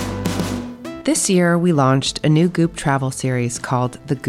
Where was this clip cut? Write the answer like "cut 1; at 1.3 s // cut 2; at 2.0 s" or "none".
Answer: cut 1; at 1.0 s